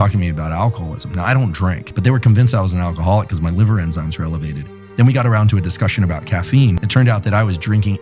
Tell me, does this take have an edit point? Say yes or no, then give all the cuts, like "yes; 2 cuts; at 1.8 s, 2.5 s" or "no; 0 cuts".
yes; 2 cuts; at 1.9 s, 6.8 s